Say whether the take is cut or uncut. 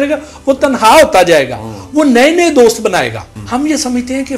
cut